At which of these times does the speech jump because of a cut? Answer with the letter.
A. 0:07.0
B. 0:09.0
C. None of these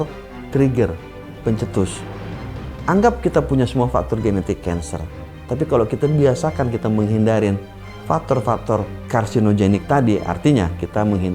B